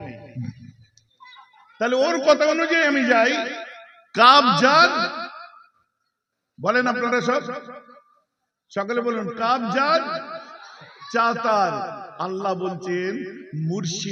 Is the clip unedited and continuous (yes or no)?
yes